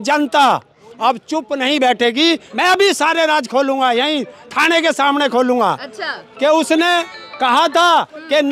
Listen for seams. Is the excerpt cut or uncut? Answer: cut